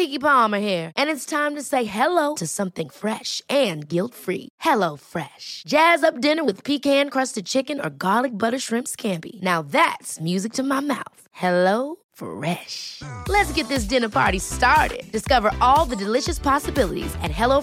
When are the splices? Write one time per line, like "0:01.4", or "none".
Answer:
none